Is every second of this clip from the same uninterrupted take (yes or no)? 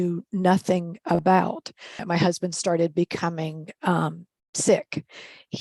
no